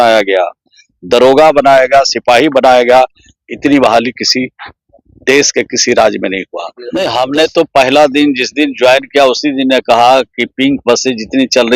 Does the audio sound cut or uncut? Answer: cut